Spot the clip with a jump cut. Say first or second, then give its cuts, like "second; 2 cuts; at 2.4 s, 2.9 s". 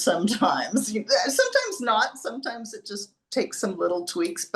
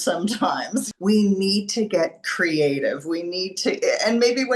second; 1 cut; at 0.9 s